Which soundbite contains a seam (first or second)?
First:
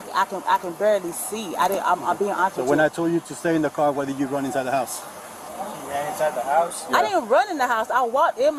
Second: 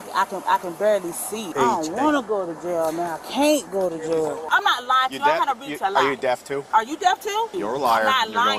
second